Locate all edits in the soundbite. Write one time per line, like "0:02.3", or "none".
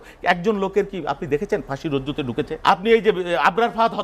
0:02.5